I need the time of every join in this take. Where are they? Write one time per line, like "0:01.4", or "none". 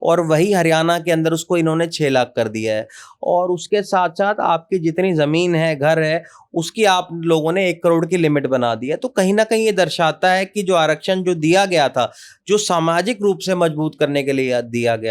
none